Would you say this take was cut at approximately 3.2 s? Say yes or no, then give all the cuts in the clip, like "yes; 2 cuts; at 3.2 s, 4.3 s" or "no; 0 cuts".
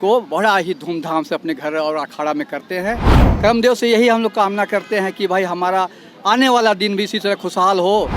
yes; 1 cut; at 3.2 s